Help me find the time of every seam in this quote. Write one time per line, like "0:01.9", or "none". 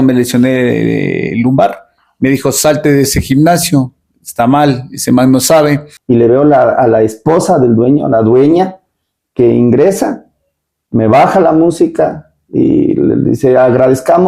0:05.9